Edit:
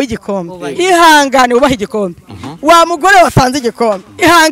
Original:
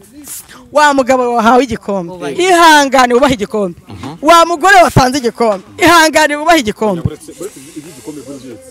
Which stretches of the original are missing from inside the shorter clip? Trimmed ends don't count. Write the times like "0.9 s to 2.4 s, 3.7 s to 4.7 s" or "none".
none